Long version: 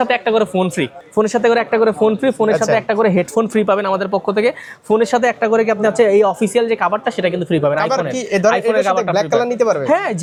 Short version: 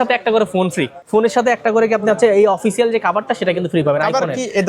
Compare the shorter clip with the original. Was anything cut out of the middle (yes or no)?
yes